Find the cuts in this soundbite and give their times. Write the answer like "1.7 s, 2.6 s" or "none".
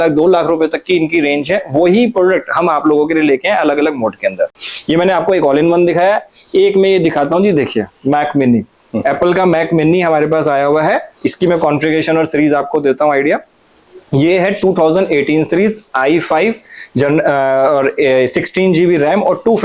none